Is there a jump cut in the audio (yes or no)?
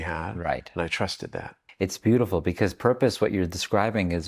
yes